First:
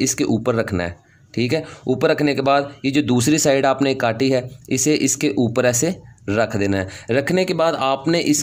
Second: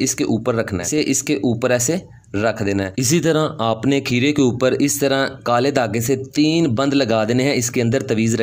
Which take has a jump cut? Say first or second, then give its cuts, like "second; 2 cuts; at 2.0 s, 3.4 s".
second; 2 cuts; at 0.9 s, 3.1 s